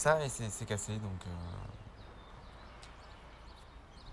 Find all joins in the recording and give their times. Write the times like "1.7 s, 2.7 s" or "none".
none